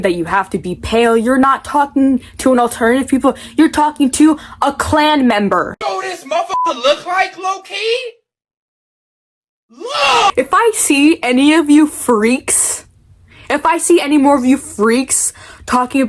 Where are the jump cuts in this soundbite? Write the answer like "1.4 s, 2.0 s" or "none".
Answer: 10.3 s